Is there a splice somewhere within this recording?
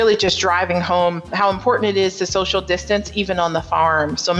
yes; 1 cut; at 1.3 s

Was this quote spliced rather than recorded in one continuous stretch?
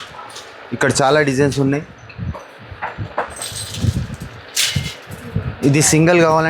no; 0 cuts

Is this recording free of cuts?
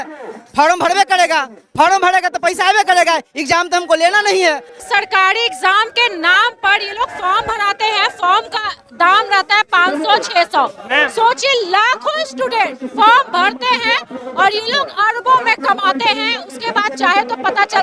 no; 1 cut; at 4.7 s

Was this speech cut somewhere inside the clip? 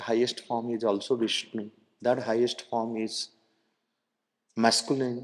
no; 0 cuts

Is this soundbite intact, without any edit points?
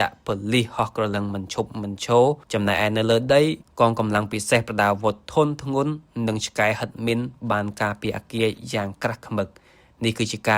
yes; 0 cuts

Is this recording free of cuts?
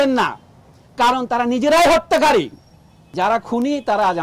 no; 1 cut; at 3.1 s

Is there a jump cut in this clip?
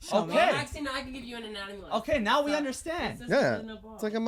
no; 0 cuts

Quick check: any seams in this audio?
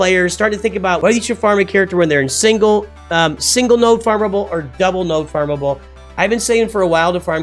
yes; 1 cut; at 1.0 s

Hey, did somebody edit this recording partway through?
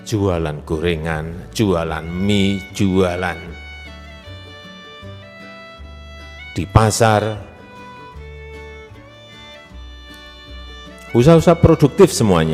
yes; 2 cuts; at 8.1 s, 10.8 s

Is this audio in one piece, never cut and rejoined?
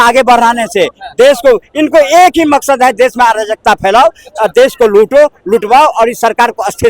yes; 0 cuts

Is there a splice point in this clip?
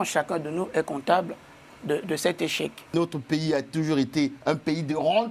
yes; 1 cut; at 2.8 s

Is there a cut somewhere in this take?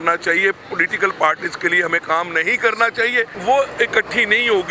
yes; 1 cut; at 3.4 s

